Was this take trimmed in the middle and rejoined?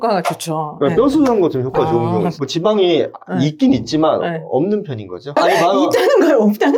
yes; 1 cut; at 2.4 s

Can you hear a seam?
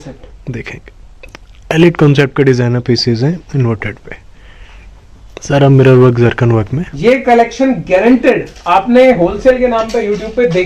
no; 0 cuts

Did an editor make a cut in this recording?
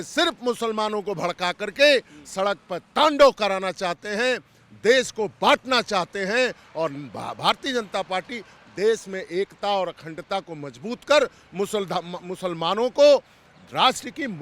no; 0 cuts

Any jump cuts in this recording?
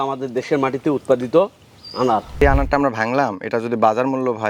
yes; 1 cut; at 2.4 s

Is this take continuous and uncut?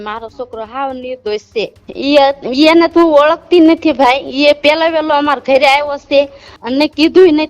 no; 2 cuts; at 1.8 s, 6.5 s

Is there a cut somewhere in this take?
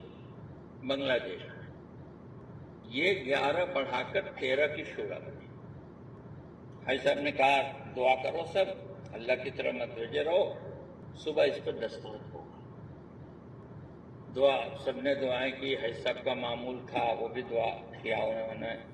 no; 0 cuts

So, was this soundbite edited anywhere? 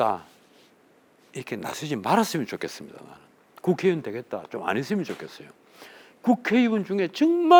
no; 0 cuts

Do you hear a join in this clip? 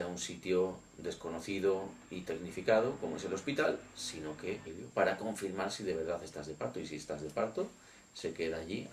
no; 0 cuts

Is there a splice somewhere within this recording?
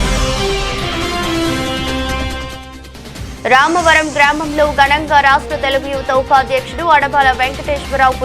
yes; 1 cut; at 3.3 s

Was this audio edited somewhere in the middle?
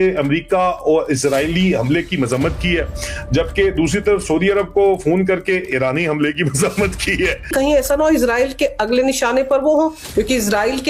yes; 1 cut; at 7.5 s

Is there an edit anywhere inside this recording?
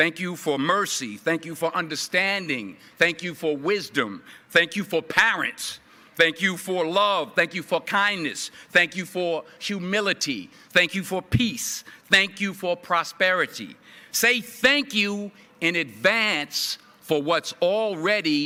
no; 0 cuts

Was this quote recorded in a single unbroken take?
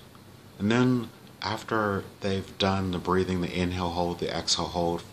yes; 0 cuts

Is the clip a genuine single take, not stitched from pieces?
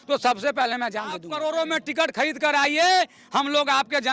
no; 1 cut; at 1.3 s

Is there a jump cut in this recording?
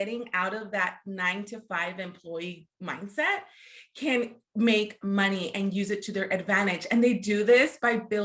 no; 0 cuts

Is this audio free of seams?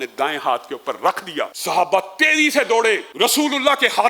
no; 2 cuts; at 1.6 s, 3.1 s

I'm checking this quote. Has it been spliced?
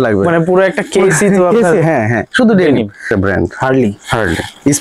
yes; 1 cut; at 3.1 s

